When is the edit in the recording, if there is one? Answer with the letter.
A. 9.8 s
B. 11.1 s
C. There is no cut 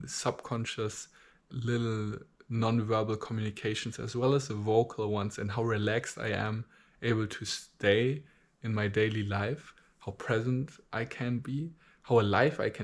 C